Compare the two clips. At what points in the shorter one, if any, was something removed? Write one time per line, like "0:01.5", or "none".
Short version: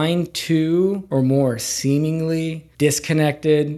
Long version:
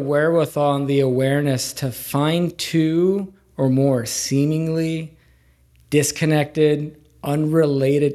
0:01.0
0:02.6